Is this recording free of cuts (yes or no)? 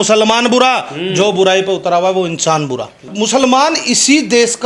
no